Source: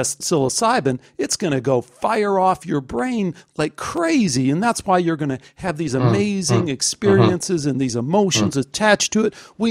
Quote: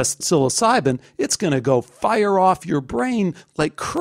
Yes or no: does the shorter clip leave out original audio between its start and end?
no